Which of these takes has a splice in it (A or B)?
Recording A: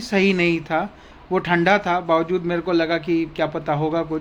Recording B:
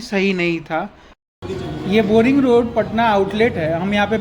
B